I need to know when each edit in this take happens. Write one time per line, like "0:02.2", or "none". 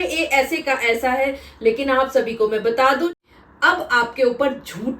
0:03.2